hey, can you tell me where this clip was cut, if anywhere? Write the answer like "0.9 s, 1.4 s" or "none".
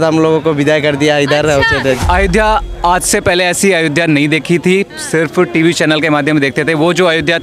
2.0 s